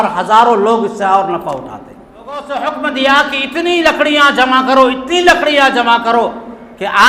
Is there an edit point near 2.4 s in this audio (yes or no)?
yes